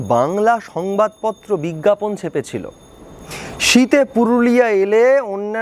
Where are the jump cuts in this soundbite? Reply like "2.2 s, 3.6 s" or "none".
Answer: none